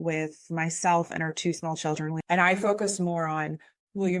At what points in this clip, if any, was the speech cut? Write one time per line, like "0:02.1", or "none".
0:02.2

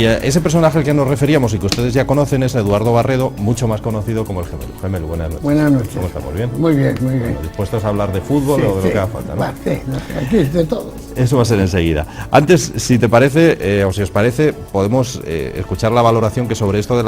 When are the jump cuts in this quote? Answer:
0:14.3

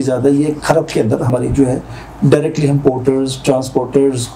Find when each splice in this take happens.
0:01.3

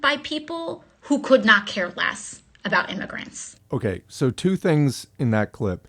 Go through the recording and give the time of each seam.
none

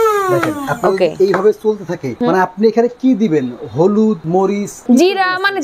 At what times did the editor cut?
0:02.2
0:04.6

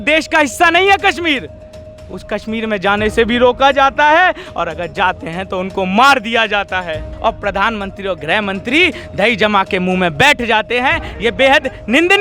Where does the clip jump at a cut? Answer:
0:07.1

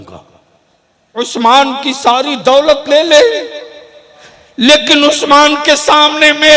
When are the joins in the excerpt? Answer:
0:01.2

